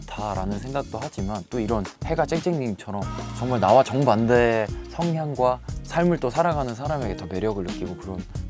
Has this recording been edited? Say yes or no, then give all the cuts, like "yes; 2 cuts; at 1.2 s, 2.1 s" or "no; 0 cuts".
no; 0 cuts